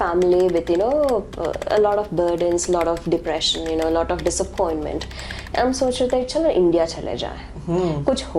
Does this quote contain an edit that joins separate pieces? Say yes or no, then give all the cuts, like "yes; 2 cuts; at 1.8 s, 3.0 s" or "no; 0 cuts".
no; 0 cuts